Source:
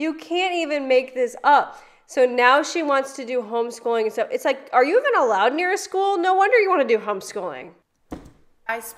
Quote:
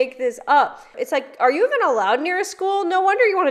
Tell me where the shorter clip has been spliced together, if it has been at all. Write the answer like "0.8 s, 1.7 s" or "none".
0.9 s